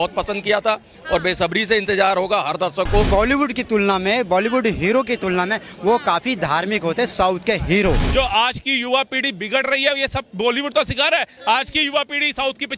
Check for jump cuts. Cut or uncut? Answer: cut